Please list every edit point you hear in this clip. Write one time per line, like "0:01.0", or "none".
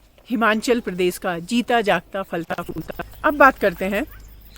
0:02.5

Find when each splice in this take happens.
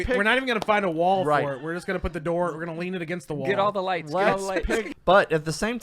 0:04.9

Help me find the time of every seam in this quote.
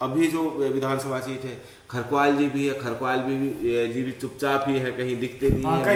none

